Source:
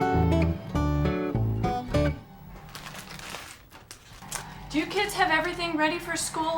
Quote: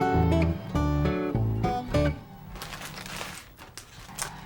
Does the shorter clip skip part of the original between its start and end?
yes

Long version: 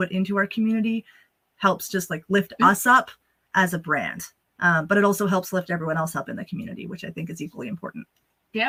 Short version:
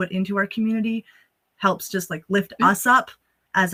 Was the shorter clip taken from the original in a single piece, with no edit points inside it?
yes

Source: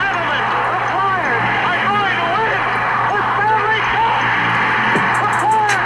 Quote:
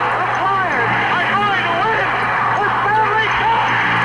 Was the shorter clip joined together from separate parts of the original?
no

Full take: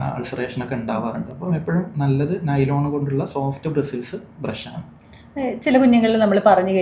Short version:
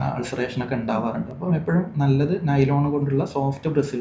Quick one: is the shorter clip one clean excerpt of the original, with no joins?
yes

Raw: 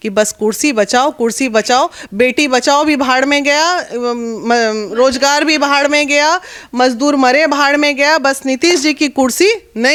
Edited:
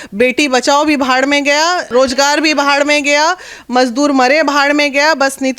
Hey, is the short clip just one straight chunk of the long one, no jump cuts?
no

